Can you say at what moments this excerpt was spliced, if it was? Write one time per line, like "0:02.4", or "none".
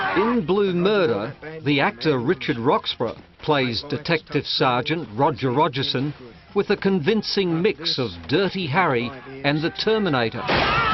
0:08.7